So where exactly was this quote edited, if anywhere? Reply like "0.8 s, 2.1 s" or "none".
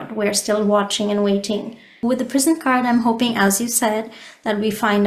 2.0 s